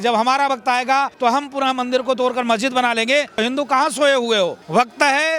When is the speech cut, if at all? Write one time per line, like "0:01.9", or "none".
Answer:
0:01.1
0:03.4